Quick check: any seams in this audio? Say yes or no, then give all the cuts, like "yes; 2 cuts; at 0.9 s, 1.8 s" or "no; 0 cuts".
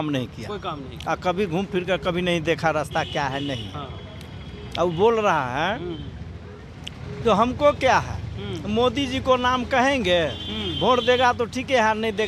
no; 0 cuts